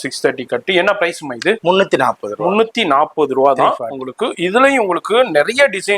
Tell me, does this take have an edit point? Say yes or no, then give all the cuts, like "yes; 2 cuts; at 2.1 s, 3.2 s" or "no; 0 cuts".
no; 0 cuts